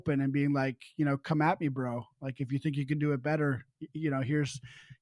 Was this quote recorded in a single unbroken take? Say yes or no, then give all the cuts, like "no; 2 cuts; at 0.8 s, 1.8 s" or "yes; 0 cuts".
yes; 0 cuts